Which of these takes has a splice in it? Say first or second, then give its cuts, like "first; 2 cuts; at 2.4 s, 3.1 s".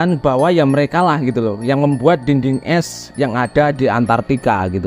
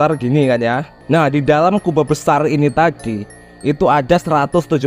second; 1 cut; at 0.9 s